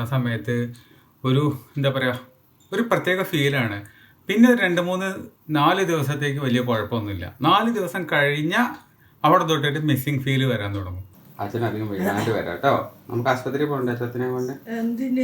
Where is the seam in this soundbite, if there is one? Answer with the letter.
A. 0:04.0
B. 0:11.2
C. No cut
B